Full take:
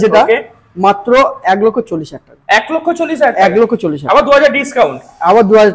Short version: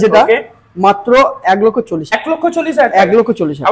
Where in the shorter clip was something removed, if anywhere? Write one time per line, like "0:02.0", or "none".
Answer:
0:02.2